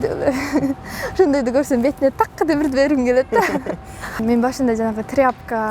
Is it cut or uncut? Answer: cut